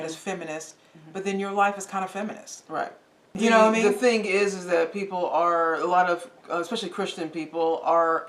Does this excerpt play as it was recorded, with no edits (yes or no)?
no